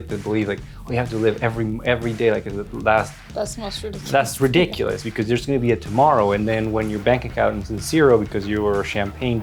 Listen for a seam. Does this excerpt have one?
no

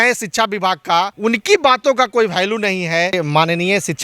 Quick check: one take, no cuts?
no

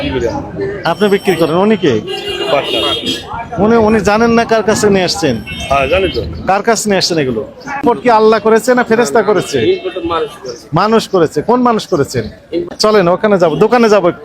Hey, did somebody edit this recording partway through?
yes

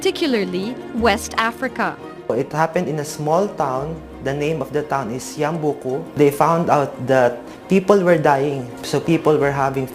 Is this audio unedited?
no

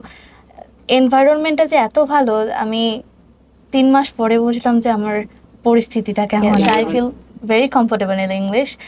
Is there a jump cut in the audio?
yes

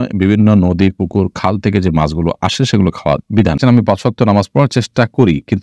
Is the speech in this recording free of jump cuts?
no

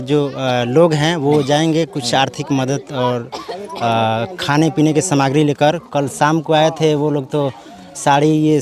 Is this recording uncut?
yes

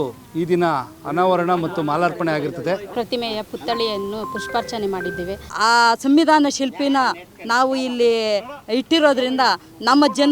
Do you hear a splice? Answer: yes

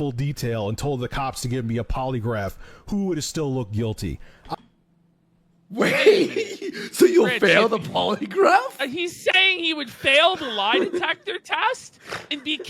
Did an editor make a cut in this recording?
yes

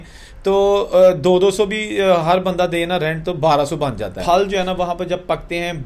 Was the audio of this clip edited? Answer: yes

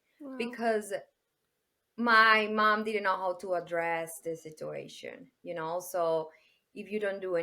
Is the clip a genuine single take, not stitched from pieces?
yes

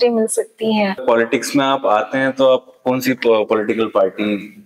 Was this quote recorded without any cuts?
no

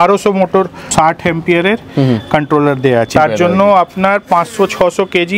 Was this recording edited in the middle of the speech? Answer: yes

